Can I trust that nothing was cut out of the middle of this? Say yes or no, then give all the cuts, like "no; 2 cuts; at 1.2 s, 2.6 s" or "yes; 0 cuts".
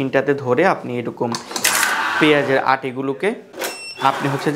no; 1 cut; at 3.5 s